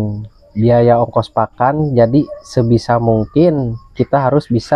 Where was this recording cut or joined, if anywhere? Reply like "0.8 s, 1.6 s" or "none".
none